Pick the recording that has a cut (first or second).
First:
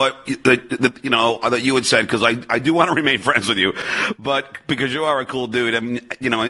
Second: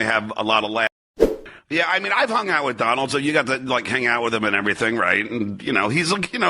second